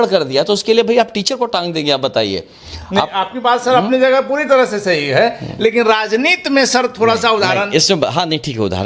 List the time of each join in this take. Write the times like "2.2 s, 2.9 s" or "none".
none